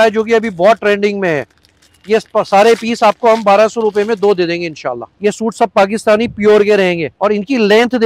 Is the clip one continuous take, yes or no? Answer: no